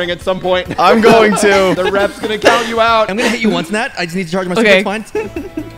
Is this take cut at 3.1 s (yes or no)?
yes